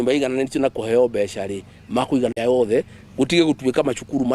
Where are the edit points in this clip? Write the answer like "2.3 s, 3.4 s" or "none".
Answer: 2.3 s